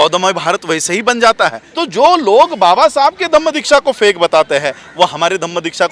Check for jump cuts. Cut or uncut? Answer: cut